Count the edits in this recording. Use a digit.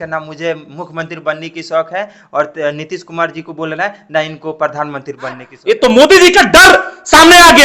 1